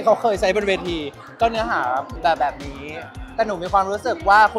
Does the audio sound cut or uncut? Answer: cut